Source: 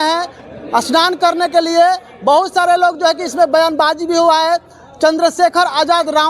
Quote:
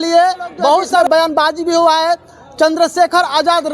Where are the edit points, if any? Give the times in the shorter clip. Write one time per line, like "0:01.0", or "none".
0:00.9